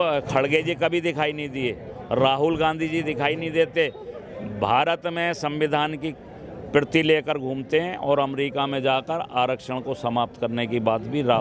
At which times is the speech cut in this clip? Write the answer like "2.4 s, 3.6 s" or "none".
none